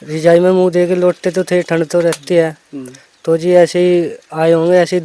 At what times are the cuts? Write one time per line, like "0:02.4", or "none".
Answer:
none